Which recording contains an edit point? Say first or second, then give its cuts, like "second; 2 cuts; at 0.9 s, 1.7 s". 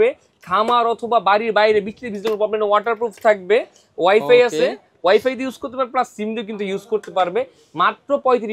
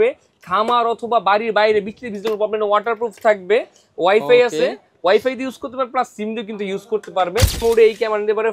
second; 1 cut; at 7.6 s